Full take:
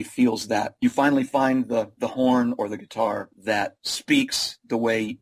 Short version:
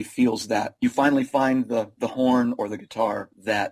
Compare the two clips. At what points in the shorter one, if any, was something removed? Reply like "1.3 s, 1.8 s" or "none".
none

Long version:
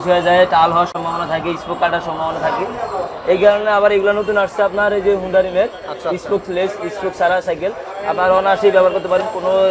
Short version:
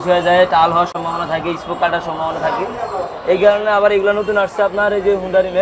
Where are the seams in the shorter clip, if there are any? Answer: none

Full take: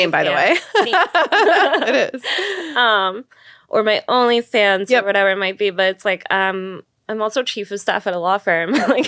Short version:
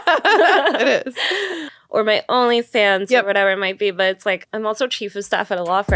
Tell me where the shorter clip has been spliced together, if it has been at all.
1.5 s, 4.4 s

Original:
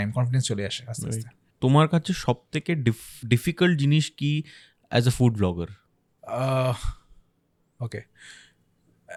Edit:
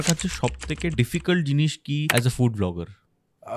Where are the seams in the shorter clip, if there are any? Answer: 0.9 s, 2.1 s

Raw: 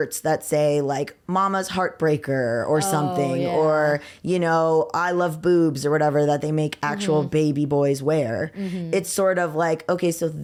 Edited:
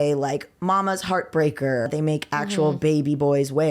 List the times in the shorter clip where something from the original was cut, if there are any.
1.9 s

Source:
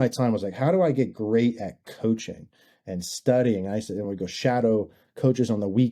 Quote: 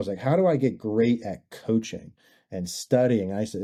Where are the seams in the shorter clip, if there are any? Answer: none

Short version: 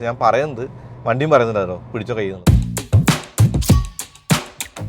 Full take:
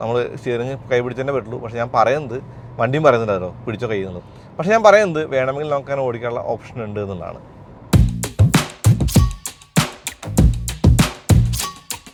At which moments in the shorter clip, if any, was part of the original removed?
2.3 s

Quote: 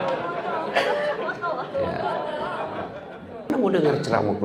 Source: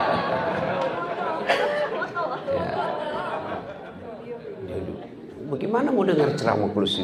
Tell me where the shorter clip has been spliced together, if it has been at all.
3.5 s

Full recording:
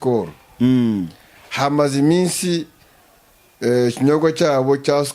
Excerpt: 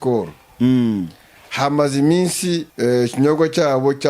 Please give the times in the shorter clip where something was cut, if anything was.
2.7 s

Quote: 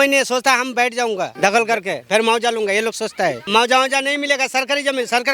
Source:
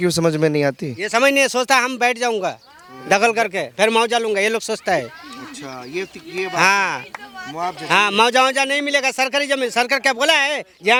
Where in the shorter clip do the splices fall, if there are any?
1.3 s, 3.5 s

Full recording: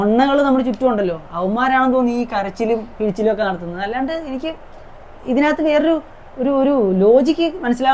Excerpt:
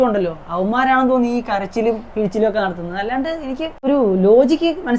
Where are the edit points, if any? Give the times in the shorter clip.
3.8 s

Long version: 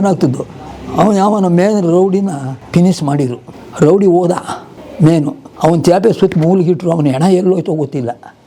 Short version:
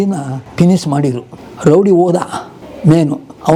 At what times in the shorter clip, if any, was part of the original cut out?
none

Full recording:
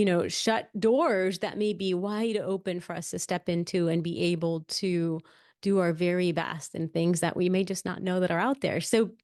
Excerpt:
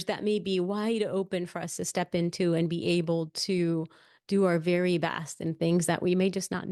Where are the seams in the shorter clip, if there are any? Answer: none

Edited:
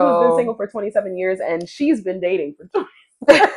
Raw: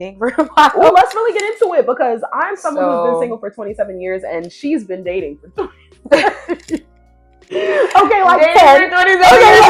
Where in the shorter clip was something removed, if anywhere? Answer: none

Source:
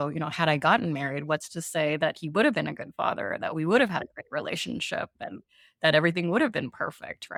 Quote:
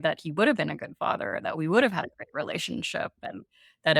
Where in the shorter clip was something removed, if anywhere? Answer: none

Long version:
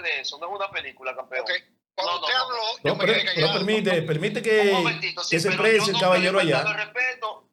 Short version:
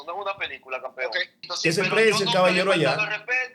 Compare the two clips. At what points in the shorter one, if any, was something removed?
1.4 s

